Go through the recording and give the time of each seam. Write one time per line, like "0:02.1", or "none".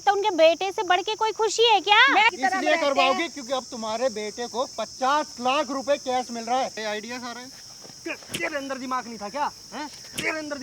0:02.3
0:06.8